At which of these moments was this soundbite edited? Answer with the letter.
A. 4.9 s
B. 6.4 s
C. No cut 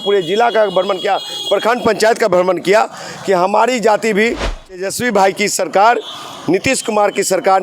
A